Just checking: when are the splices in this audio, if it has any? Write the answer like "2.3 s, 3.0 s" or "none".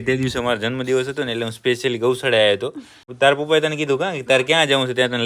3.1 s